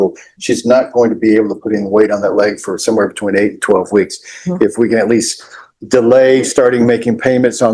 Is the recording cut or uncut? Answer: uncut